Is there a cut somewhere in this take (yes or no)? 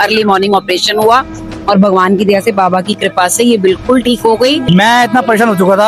yes